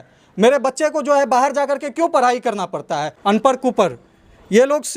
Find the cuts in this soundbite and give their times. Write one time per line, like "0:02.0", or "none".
0:03.1